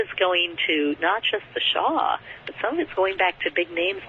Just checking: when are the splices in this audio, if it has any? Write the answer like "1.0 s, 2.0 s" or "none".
2.9 s